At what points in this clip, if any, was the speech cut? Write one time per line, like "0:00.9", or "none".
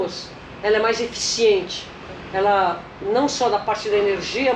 none